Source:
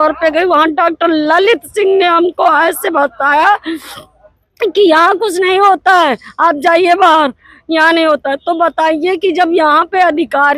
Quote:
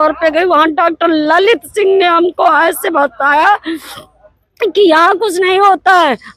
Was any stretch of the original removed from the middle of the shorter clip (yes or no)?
no